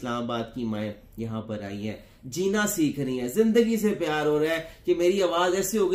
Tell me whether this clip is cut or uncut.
uncut